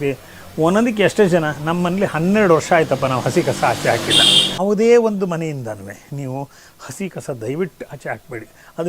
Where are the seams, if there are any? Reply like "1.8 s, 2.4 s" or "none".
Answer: 4.6 s